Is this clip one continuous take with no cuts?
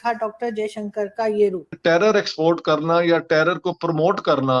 no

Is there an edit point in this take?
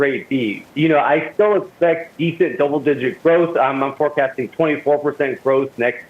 no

